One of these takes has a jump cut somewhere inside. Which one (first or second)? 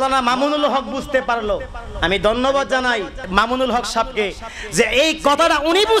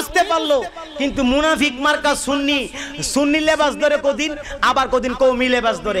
first